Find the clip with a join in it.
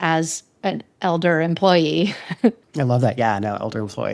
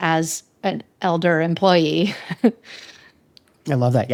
first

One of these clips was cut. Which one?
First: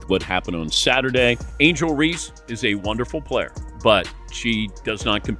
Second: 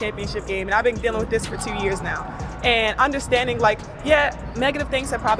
first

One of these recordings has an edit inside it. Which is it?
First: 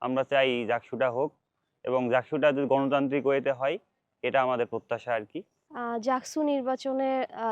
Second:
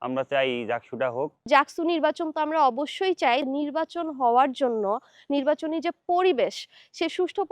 second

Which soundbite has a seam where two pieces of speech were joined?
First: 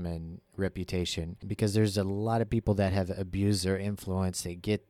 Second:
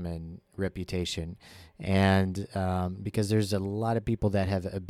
first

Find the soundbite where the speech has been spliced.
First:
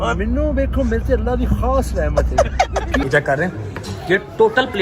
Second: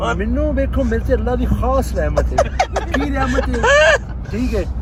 first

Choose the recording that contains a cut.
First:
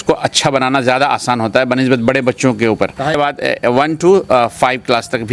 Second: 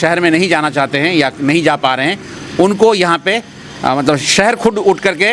first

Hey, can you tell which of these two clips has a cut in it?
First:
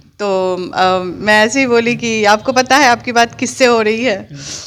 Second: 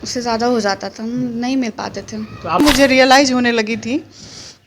second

